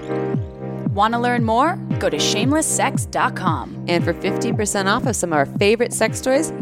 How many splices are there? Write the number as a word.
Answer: one